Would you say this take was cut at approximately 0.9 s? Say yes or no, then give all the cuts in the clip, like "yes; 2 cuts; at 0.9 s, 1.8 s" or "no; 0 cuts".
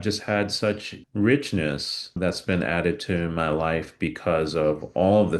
yes; 2 cuts; at 0.9 s, 2.2 s